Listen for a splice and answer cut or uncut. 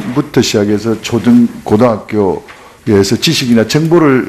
uncut